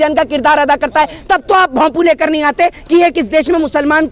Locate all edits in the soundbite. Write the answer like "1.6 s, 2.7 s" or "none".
none